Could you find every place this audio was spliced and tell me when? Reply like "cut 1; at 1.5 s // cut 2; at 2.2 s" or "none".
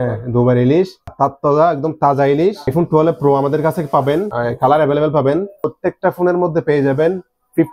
cut 1; at 1.1 s // cut 2; at 2.7 s // cut 3; at 4.3 s // cut 4; at 5.7 s